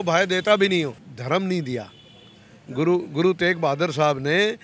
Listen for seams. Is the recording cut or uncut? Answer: cut